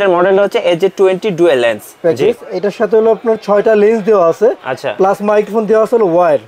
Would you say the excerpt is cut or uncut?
cut